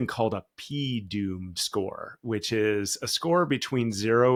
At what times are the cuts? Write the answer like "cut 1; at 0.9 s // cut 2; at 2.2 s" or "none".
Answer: none